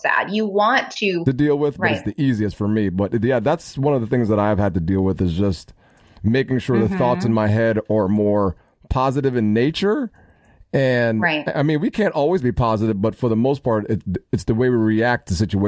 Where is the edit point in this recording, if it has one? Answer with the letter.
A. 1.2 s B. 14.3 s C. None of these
A